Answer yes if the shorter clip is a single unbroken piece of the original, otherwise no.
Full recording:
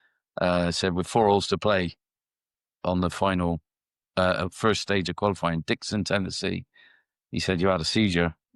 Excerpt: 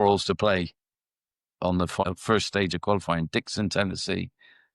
no